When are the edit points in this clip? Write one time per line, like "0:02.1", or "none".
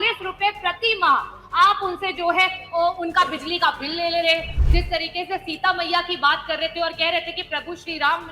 0:04.6